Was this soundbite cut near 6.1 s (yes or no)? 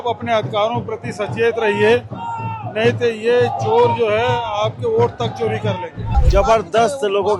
yes